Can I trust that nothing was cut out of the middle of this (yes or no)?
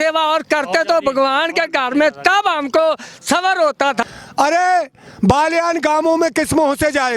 no